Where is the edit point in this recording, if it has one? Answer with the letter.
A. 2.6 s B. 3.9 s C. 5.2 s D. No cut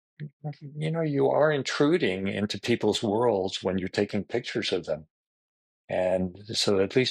D